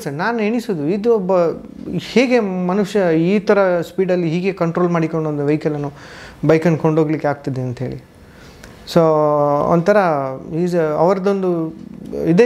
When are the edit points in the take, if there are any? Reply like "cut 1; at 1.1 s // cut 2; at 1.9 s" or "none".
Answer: none